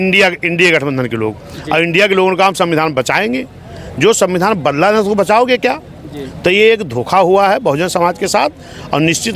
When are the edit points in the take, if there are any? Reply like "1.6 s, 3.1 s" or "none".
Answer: none